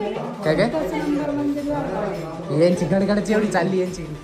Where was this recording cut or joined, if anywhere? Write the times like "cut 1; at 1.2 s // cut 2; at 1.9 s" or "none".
none